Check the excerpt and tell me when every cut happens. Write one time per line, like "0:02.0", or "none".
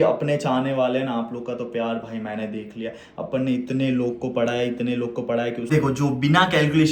0:05.7